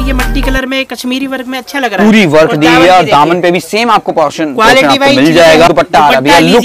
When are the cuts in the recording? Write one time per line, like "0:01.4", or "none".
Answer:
0:05.7